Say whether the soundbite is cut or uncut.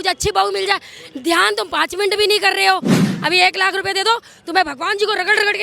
cut